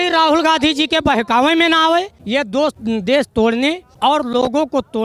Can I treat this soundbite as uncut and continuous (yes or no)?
no